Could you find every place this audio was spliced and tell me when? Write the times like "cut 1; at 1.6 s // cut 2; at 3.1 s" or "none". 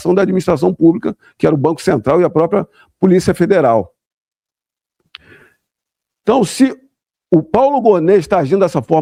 none